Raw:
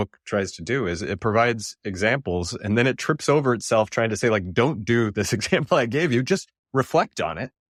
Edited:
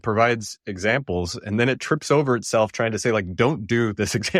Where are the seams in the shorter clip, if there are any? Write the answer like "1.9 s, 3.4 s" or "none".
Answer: none